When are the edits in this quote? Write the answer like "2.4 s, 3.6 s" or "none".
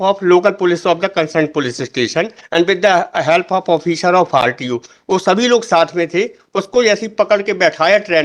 none